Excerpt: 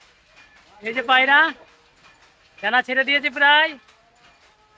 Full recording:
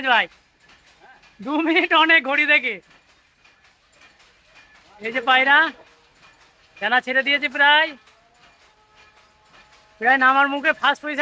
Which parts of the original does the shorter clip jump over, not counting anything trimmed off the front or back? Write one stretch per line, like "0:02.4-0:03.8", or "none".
none